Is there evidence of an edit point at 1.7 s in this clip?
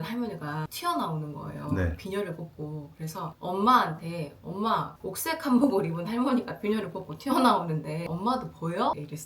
no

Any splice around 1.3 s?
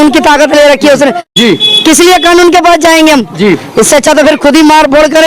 yes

